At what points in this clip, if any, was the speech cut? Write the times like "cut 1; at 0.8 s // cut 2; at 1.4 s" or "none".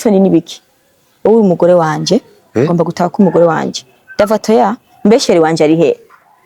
none